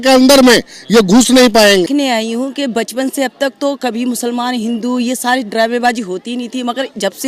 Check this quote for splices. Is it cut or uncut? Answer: cut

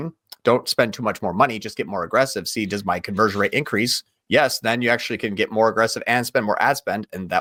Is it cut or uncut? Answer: uncut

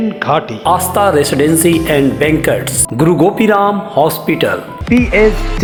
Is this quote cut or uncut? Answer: uncut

